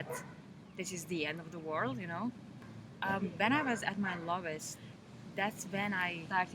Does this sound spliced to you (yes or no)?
yes